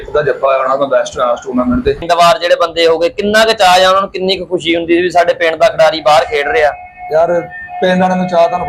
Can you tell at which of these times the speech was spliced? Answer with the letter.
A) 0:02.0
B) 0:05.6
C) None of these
A